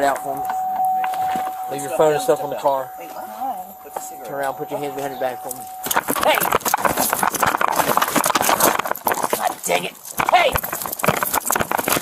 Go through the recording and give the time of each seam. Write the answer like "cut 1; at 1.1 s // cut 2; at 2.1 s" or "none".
none